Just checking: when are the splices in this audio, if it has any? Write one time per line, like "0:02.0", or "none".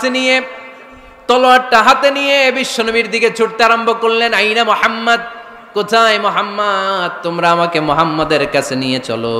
none